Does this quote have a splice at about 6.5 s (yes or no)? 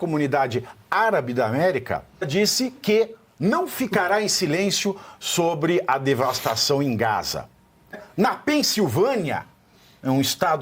no